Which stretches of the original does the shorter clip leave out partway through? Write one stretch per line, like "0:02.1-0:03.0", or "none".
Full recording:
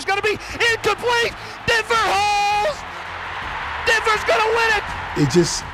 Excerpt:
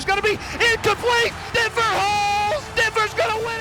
0:01.4-0:01.5
0:02.8-0:03.8